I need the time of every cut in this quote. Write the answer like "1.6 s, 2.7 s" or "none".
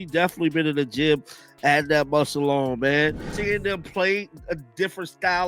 3.3 s